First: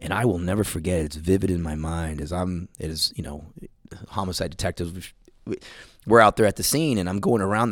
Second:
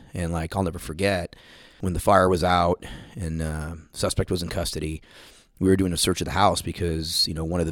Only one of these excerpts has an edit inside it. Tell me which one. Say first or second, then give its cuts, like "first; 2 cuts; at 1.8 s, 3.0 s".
second; 1 cut; at 1.6 s